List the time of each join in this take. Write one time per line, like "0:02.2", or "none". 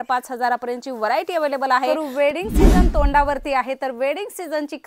0:01.9